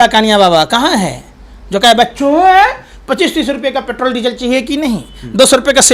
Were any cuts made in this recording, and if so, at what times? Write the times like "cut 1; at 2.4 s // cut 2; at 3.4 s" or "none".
none